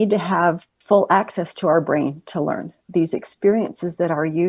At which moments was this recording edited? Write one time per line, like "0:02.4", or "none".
0:02.9